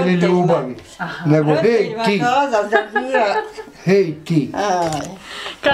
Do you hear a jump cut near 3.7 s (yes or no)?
no